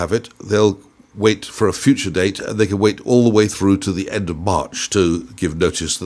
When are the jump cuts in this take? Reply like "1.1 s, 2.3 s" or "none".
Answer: none

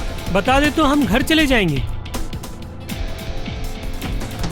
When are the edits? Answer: none

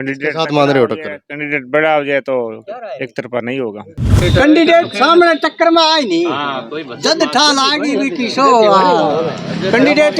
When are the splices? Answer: 4.2 s

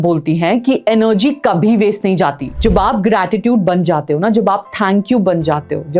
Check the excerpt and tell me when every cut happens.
2.4 s

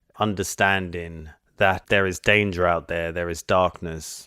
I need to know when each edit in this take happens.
1.7 s

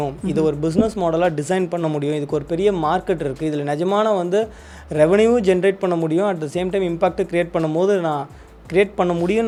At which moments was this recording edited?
none

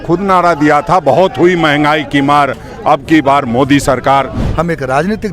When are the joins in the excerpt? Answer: 4.4 s

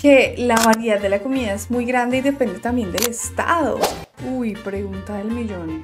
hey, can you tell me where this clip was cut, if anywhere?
4.0 s

